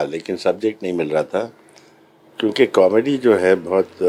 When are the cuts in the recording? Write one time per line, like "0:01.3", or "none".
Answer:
none